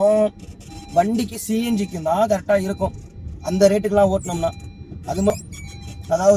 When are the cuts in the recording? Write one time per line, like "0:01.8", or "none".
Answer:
0:05.3